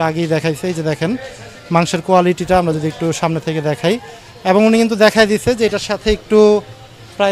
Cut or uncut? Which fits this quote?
uncut